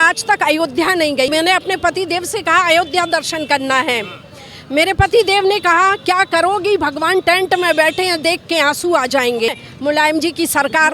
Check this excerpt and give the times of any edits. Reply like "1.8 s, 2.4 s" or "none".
1.3 s, 9.6 s